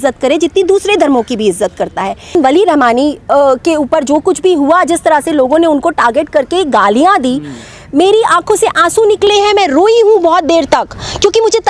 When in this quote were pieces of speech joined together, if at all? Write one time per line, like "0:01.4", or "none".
0:02.3